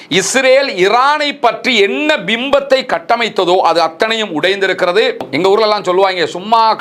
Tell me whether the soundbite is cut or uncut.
cut